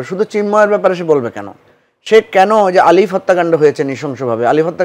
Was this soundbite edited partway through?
no; 0 cuts

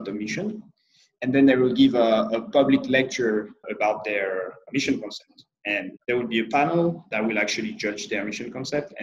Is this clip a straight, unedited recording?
no; 4 cuts; at 3.7 s, 4.6 s, 5.9 s, 7.1 s

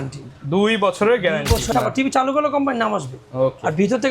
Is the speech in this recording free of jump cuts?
no; 1 cut; at 1.7 s

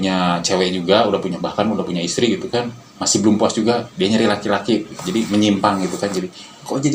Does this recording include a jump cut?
no; 0 cuts

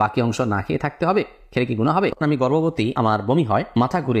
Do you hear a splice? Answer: yes; 1 cut; at 2.2 s

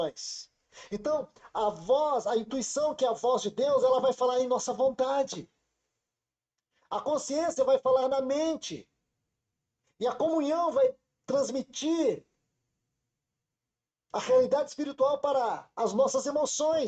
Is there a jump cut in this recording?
no; 0 cuts

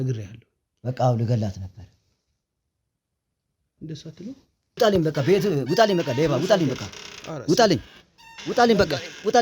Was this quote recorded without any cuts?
no; 1 cut; at 4.8 s

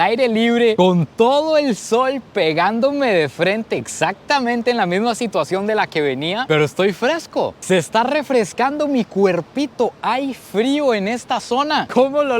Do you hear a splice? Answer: yes; 1 cut; at 7.6 s

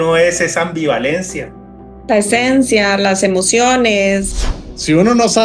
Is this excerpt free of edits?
no; 1 cut; at 4.3 s

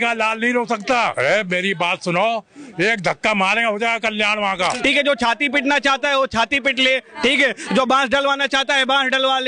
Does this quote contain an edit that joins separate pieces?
yes; 2 cuts; at 1.1 s, 4.8 s

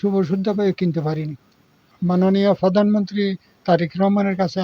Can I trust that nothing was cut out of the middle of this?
no; 1 cut; at 1.9 s

